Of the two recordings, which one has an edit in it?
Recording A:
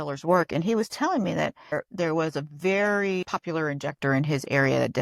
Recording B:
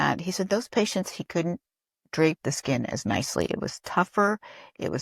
A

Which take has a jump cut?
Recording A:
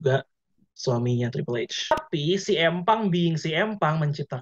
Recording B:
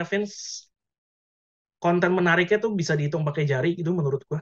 A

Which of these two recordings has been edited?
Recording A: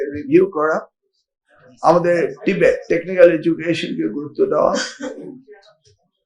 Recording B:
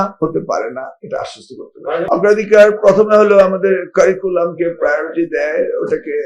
B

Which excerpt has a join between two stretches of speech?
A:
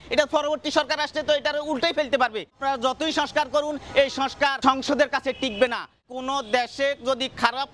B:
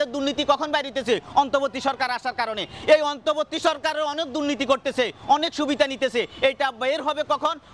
A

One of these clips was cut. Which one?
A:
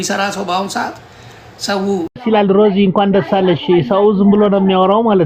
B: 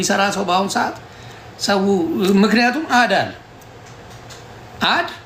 A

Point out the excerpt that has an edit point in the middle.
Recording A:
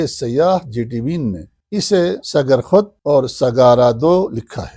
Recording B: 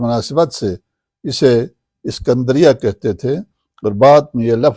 A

